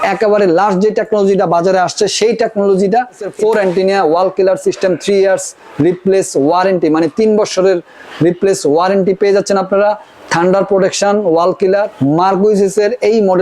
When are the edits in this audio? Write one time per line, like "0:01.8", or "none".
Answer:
0:03.3
0:11.9